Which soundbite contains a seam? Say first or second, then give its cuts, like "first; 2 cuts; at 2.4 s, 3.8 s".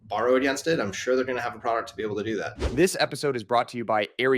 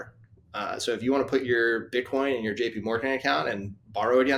first; 1 cut; at 2.5 s